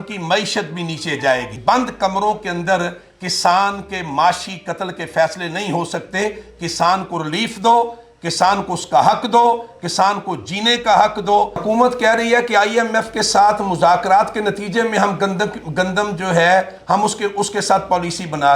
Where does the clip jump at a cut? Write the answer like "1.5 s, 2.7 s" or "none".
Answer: 1.5 s, 11.6 s